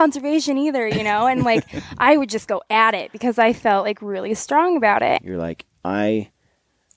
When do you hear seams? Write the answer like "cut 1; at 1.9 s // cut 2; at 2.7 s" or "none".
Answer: cut 1; at 5.2 s

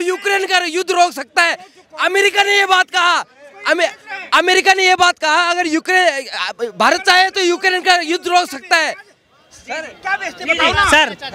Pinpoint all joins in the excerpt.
none

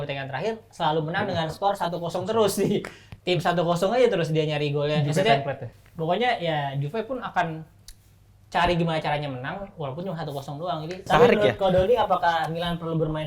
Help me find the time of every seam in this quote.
cut 1; at 11.0 s

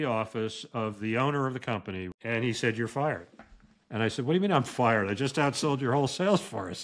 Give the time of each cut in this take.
none

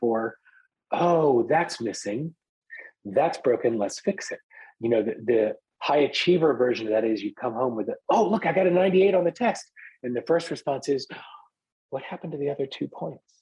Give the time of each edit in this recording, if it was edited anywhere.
cut 1; at 2.6 s

